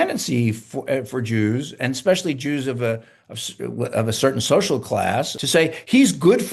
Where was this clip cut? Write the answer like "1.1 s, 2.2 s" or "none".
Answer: 5.4 s